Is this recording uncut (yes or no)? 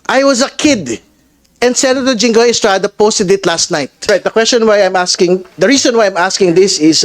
no